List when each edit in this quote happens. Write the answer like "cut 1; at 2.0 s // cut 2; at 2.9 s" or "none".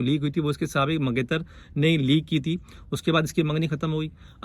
none